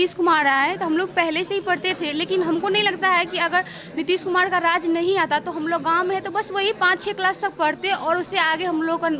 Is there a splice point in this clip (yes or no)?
no